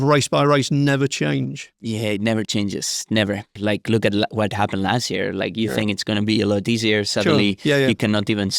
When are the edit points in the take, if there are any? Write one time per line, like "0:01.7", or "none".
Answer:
0:03.5